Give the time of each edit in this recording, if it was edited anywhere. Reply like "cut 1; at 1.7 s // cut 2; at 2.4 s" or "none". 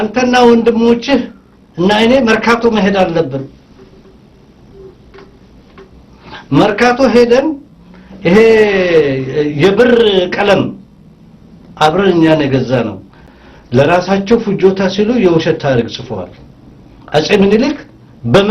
cut 1; at 13.3 s